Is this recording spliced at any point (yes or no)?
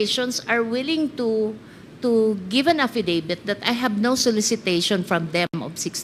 no